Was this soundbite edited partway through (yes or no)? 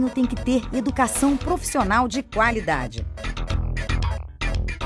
no